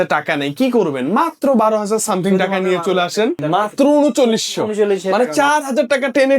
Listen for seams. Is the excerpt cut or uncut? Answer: cut